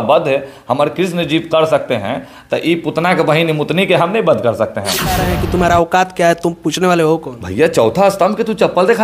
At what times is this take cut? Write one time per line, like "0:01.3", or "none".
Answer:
0:05.2